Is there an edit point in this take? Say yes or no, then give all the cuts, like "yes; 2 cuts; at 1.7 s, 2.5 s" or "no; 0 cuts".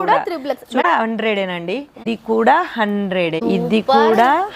yes; 3 cuts; at 0.8 s, 2.0 s, 3.4 s